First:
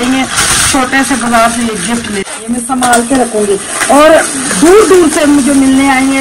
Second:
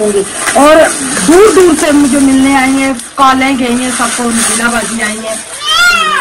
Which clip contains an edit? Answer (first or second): first